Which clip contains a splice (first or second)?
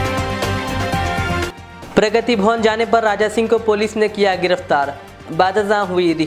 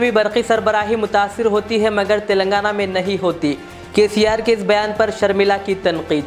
first